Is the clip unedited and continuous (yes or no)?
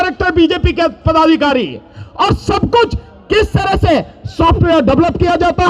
yes